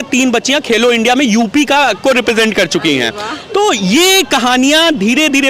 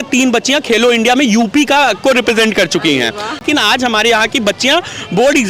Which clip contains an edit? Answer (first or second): second